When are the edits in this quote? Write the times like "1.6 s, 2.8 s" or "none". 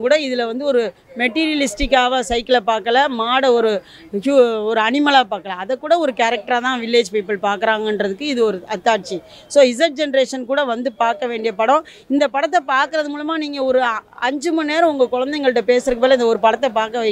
none